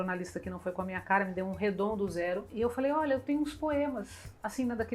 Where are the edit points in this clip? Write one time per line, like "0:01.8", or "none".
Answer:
0:02.5